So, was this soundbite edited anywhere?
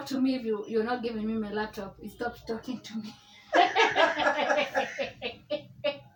no; 0 cuts

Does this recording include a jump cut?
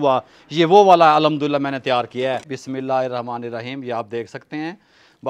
yes; 1 cut; at 2.5 s

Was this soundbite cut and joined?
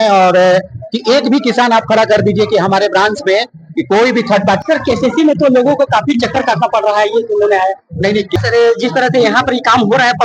yes; 2 cuts; at 4.6 s, 8.4 s

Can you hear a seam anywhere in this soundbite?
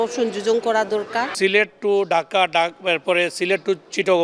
no; 0 cuts

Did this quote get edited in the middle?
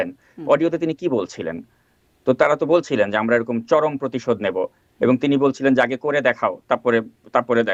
no; 0 cuts

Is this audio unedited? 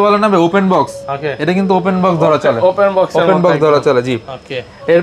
yes; 0 cuts

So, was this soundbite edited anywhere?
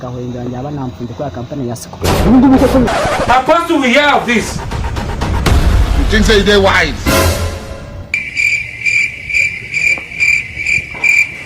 yes; 1 cut; at 2.9 s

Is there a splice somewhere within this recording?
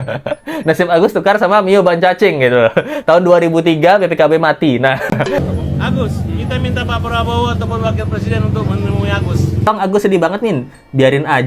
yes; 2 cuts; at 5.4 s, 9.7 s

